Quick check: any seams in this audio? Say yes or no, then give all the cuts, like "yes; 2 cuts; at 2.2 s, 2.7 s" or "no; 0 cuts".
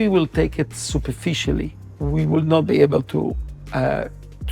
no; 0 cuts